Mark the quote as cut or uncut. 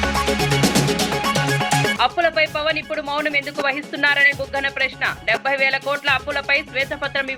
uncut